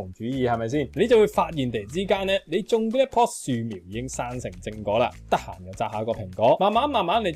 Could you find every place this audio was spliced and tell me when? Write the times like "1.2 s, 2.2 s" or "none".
0.9 s